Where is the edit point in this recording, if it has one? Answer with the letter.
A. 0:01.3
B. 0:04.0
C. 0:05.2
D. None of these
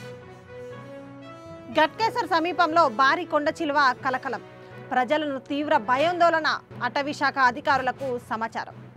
A